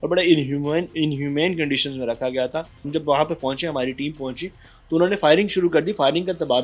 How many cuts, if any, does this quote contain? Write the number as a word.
one